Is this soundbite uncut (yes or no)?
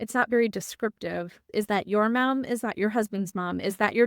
no